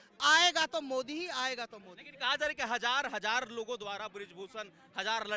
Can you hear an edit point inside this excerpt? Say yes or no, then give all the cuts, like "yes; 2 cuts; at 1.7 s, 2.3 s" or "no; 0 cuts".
no; 0 cuts